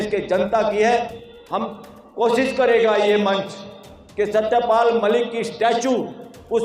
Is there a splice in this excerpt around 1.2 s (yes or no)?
yes